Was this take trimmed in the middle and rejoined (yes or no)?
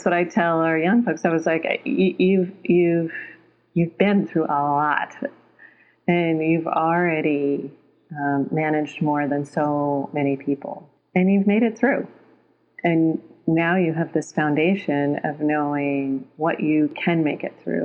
no